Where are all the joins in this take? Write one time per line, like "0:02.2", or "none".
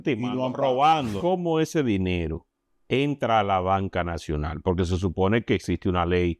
0:01.2